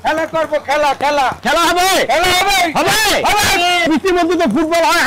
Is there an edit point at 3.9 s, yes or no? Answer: yes